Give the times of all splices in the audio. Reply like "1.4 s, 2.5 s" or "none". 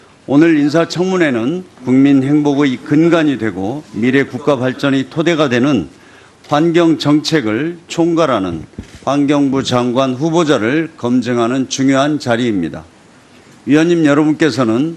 11.6 s